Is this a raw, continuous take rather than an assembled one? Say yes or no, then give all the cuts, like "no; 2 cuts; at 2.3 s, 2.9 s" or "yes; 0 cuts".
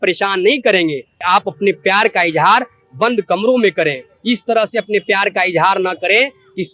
no; 1 cut; at 1.1 s